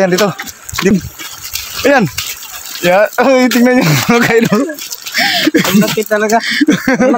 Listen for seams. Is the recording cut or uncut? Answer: cut